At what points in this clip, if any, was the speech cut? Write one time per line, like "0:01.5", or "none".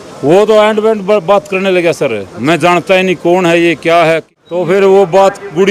0:04.3